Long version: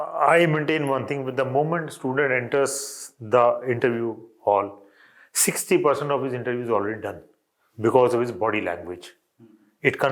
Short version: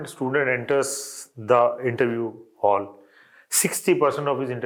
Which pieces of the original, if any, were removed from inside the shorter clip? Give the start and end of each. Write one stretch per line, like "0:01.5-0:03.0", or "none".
none